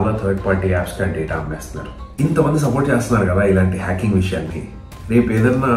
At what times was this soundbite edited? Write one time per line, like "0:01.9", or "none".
0:02.1